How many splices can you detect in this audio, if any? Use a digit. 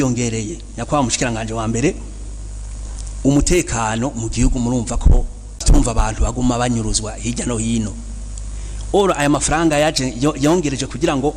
1